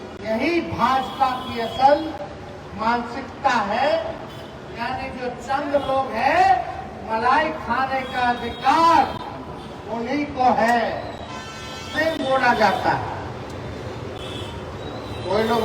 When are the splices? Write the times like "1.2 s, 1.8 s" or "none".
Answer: 11.9 s